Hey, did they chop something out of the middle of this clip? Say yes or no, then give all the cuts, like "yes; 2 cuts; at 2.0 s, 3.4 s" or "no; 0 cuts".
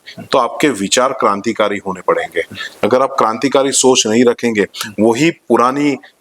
no; 0 cuts